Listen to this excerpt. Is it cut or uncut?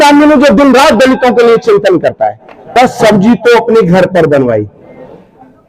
cut